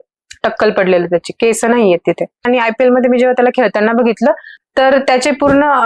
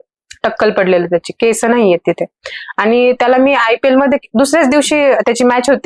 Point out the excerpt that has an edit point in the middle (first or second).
first